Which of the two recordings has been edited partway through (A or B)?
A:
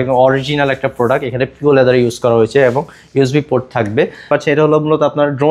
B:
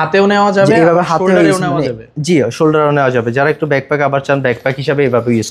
A